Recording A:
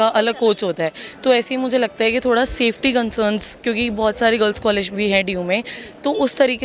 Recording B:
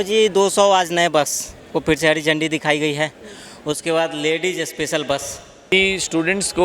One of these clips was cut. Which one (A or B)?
B